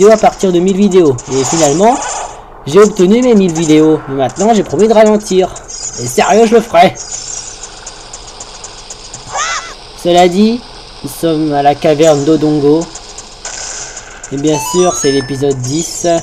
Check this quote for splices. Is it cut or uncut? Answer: uncut